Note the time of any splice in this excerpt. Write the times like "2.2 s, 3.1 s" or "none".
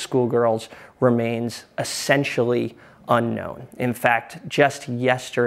3.6 s